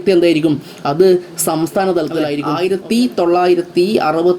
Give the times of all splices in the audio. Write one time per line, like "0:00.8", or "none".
0:02.4

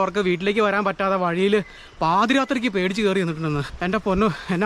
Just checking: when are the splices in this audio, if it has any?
0:03.7

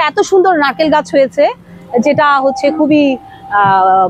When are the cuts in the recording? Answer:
none

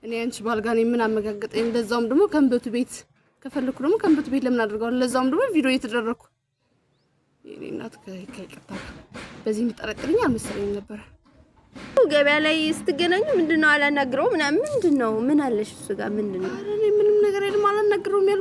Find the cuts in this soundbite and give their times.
0:12.0

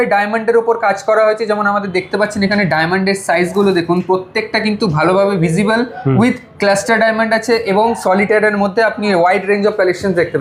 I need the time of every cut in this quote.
none

